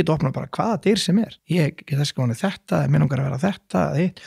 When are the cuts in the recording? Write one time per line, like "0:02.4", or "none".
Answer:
0:01.4

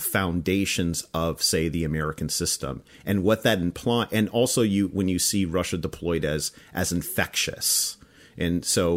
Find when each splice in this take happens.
none

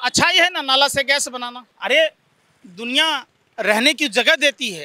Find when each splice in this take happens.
0:01.7

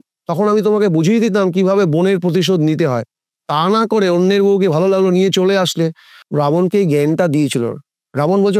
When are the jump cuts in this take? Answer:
none

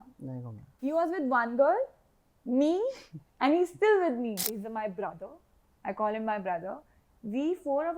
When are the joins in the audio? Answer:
0:04.5

